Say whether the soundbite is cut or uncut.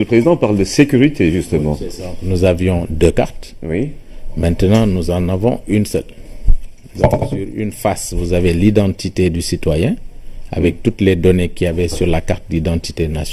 cut